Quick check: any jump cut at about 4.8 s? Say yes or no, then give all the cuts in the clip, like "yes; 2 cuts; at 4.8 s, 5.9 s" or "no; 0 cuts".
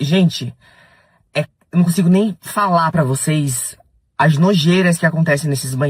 no; 0 cuts